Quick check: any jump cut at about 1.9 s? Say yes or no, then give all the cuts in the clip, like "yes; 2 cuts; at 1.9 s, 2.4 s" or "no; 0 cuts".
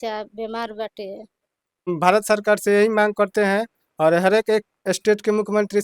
yes; 1 cut; at 1.9 s